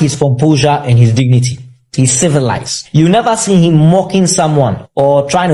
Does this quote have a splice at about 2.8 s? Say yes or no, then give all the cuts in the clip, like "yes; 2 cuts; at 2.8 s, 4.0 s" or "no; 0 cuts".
no; 0 cuts